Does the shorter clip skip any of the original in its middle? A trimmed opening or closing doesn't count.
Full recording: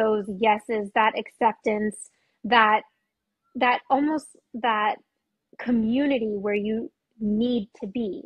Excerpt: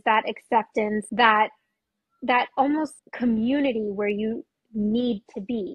yes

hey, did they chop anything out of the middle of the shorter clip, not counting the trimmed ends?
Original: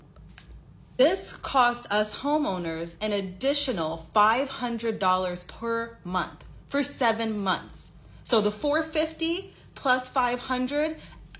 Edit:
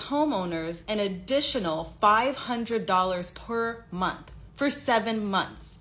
no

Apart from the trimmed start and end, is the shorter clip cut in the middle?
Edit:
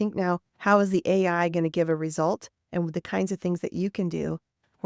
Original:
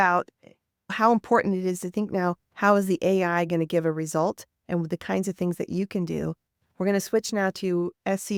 no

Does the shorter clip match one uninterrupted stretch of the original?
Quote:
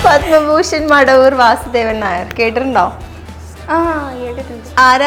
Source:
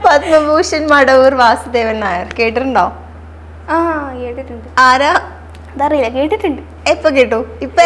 yes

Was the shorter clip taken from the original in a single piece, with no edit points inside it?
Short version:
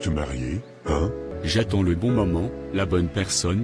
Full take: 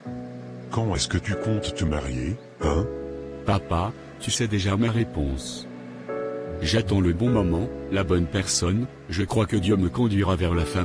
no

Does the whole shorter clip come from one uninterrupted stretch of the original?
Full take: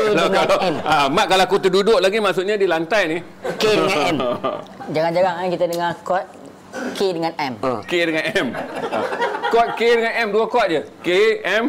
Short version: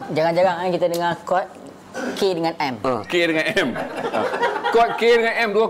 yes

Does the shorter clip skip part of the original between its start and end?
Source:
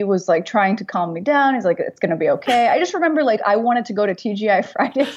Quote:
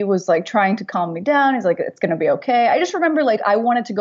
no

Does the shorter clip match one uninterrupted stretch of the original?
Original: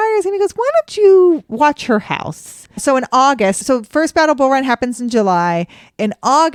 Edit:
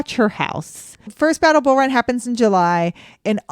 no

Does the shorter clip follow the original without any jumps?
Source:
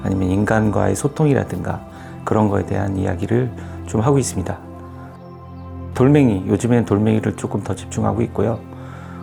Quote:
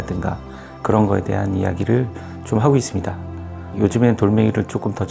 no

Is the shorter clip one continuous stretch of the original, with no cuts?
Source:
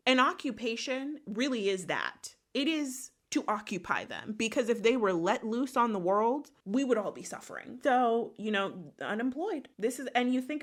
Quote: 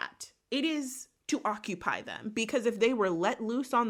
yes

